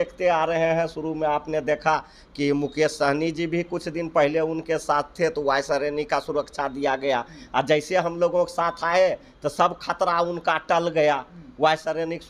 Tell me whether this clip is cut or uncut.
uncut